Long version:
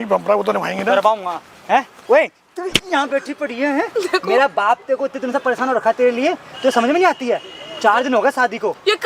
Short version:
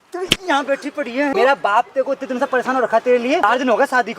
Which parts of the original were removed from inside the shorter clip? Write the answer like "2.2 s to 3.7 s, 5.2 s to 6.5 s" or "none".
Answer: 3.7 s to 4.2 s, 6.4 s to 7.9 s

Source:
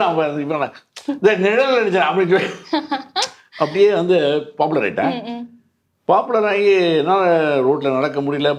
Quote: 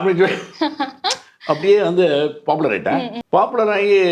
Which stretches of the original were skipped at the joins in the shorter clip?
5.3 s to 5.9 s

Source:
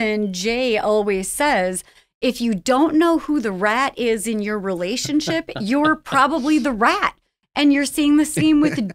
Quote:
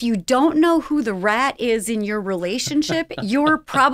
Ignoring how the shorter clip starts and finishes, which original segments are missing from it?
none

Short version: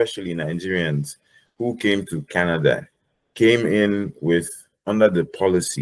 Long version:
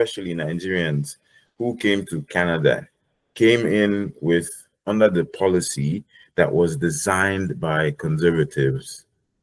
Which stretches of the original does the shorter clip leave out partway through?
none

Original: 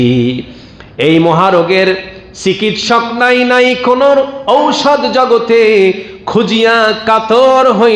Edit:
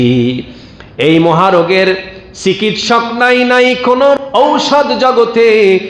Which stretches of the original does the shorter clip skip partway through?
4.2 s to 4.3 s

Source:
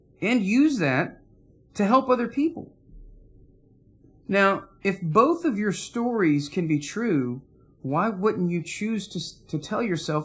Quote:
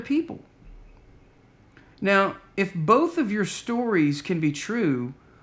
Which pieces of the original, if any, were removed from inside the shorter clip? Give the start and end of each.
none

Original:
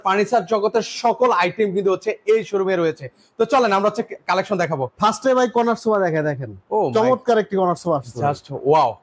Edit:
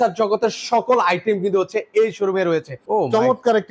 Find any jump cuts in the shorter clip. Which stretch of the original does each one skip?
3.1 s to 6.6 s

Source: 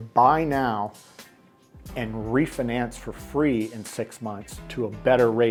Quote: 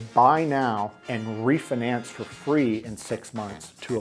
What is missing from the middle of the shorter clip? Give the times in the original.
1.0 s to 1.9 s

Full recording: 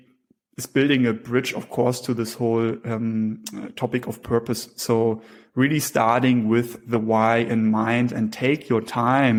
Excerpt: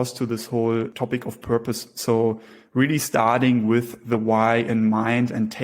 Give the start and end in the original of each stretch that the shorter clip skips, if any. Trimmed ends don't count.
2.8 s to 3.7 s

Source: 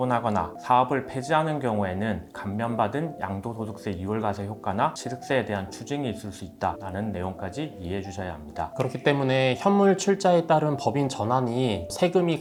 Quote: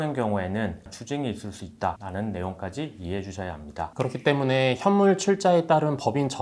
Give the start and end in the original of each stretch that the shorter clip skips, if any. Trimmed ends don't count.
2.4 s to 5.7 s

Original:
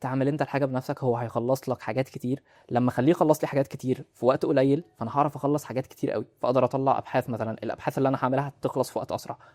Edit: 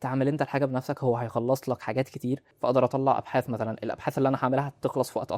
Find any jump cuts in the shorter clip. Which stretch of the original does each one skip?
2.5 s to 6.3 s

